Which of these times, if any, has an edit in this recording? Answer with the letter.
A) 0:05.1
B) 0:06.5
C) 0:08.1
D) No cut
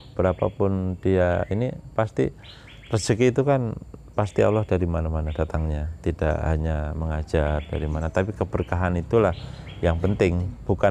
D